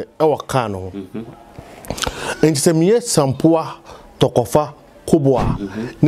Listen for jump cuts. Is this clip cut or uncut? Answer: uncut